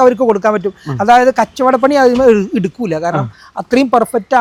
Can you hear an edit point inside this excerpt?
no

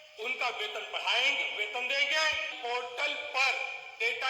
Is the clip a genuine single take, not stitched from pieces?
no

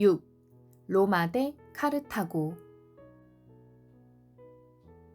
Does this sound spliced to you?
yes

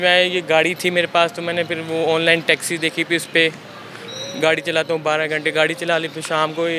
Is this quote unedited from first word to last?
yes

